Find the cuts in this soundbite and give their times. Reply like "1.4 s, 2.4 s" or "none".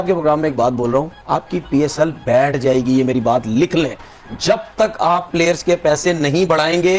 none